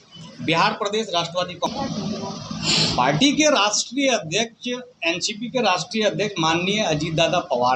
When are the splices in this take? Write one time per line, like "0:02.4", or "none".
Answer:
0:01.7